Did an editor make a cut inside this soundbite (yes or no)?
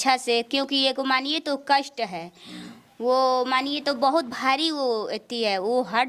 no